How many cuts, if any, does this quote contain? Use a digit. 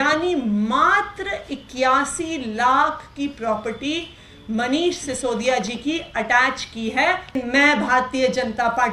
1